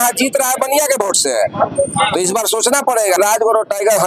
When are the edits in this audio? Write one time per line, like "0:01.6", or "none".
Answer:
0:03.2